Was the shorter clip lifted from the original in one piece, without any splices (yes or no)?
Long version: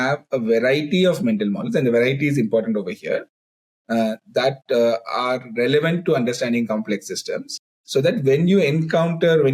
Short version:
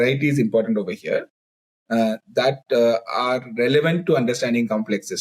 yes